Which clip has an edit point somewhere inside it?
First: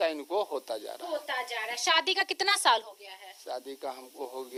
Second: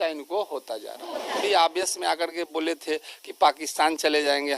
second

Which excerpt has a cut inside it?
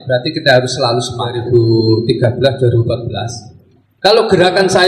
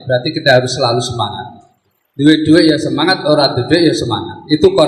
first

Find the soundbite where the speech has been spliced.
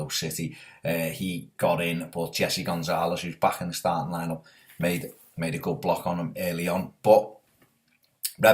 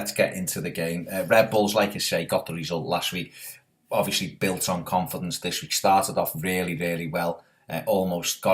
second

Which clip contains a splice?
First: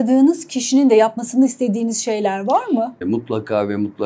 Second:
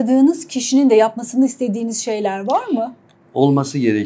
first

